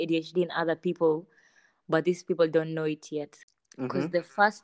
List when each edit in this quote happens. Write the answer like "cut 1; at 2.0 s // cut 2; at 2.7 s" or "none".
cut 1; at 3.4 s